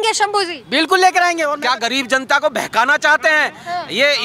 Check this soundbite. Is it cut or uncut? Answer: cut